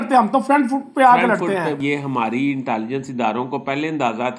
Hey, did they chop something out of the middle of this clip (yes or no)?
yes